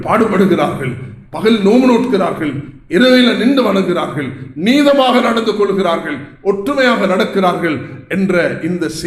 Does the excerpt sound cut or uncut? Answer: uncut